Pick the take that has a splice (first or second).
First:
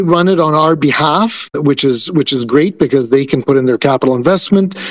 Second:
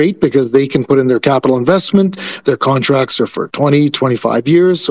first